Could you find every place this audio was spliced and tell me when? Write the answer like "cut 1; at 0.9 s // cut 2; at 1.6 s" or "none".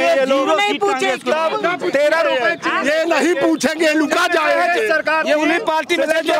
none